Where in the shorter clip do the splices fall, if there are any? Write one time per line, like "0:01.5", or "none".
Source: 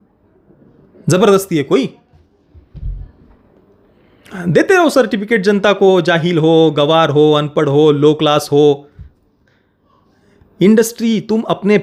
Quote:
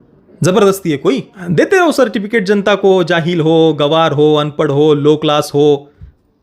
0:01.3